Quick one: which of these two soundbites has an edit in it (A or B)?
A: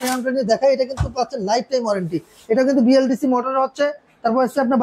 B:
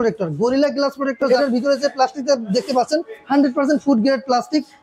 B